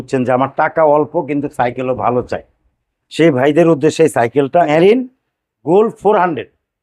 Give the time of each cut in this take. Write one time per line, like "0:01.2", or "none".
0:04.7